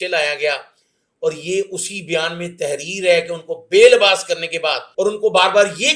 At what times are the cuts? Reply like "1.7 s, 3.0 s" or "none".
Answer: 4.8 s